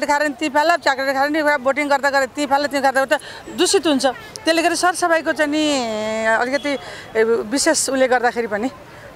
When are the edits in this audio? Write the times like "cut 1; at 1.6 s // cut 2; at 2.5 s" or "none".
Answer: none